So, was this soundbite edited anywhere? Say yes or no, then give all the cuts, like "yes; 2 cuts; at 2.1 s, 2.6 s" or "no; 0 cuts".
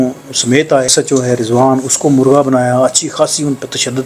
yes; 1 cut; at 0.9 s